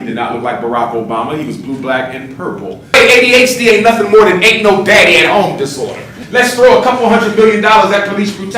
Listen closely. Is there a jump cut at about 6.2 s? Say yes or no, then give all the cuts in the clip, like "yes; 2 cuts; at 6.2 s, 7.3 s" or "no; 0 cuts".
yes; 2 cuts; at 2.8 s, 6.2 s